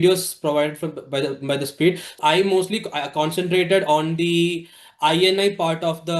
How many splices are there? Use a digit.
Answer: 1